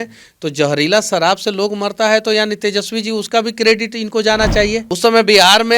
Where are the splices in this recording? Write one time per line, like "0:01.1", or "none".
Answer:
0:04.9